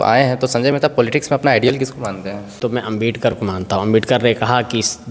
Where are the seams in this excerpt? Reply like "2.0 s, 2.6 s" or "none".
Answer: 3.0 s

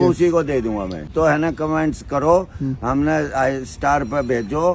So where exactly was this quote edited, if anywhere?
1.1 s

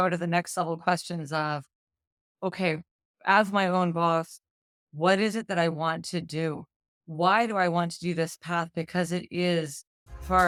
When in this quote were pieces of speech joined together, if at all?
none

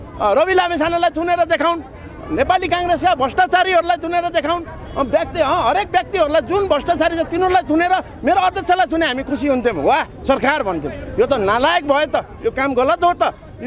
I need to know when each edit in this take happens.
none

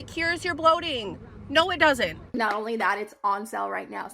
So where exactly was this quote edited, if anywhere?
2.2 s

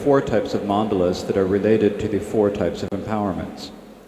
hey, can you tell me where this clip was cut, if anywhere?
3.0 s

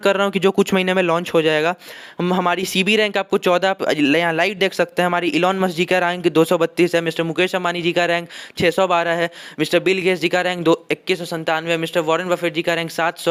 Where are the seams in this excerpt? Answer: none

